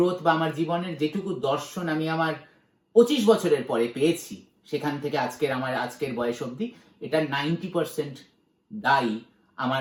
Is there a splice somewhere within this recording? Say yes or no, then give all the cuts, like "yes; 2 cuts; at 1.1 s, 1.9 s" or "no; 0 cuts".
no; 0 cuts